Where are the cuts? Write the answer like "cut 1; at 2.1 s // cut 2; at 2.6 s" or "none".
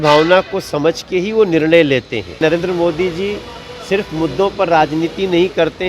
cut 1; at 2.4 s